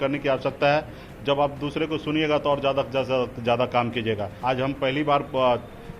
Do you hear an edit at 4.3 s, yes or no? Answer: yes